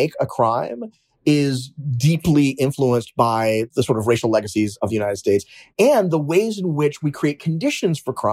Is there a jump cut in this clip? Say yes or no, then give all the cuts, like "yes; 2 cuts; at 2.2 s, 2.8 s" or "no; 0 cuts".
yes; 2 cuts; at 3.7 s, 4.8 s